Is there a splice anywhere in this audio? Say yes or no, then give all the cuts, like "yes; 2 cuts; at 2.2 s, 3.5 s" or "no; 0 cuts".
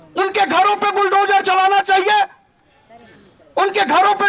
no; 0 cuts